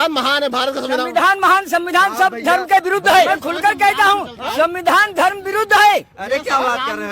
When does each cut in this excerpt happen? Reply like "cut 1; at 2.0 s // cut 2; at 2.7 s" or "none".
cut 1; at 3.3 s